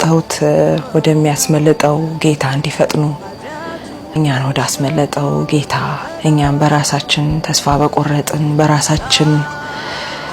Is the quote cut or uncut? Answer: uncut